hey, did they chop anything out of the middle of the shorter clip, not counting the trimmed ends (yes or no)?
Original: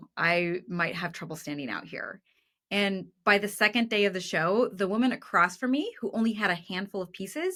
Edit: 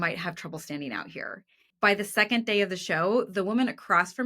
yes